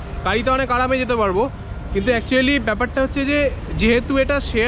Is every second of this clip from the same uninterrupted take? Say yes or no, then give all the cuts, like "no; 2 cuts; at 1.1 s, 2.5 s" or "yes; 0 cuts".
yes; 0 cuts